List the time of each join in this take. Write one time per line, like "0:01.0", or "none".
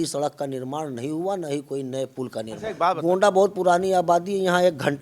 0:02.7